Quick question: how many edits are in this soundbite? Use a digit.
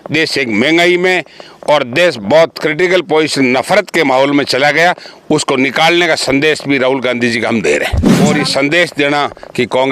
1